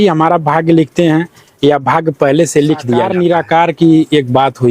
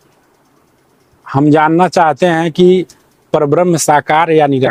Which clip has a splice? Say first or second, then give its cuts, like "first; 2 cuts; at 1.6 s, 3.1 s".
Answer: first; 1 cut; at 3.1 s